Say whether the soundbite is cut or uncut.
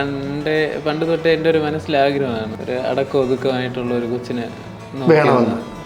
cut